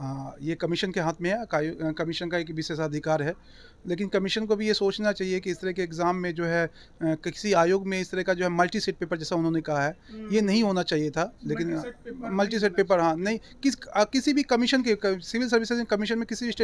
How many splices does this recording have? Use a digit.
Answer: 0